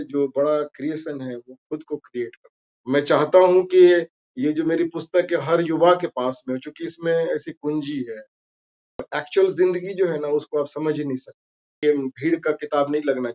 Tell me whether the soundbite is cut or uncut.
cut